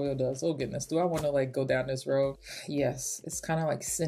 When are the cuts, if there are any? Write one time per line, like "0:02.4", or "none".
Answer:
0:02.5